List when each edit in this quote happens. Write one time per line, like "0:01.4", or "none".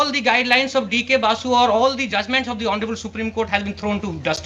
none